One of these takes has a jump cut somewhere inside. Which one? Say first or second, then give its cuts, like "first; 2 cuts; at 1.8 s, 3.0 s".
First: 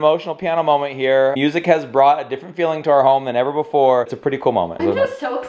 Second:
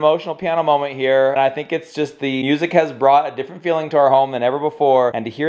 first; 2 cuts; at 1.3 s, 4.1 s